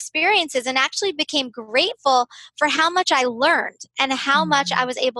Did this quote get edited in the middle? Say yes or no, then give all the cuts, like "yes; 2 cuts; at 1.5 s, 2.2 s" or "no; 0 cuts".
no; 0 cuts